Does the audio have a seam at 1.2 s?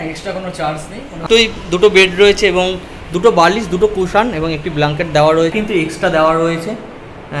yes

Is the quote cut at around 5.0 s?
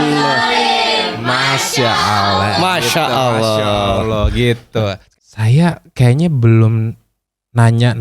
yes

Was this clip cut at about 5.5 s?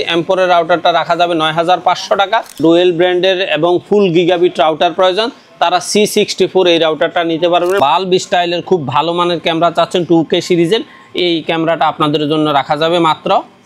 no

